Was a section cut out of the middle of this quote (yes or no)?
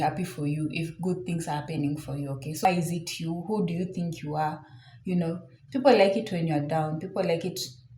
yes